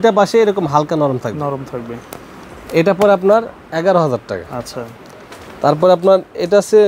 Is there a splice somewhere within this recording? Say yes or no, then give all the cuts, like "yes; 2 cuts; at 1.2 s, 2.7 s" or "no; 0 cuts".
no; 0 cuts